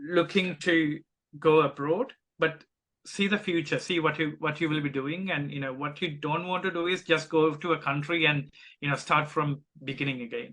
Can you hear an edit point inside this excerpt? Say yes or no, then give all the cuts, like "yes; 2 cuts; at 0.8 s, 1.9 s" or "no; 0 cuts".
no; 0 cuts